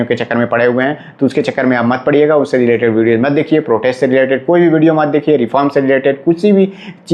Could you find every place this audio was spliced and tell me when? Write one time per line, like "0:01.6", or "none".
none